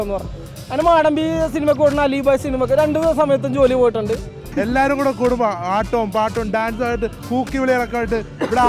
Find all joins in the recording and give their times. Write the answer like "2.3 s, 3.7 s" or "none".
4.4 s